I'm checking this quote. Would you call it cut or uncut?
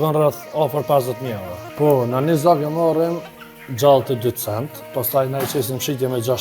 cut